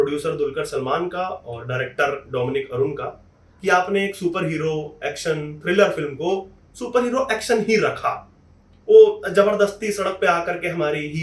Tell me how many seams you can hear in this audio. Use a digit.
0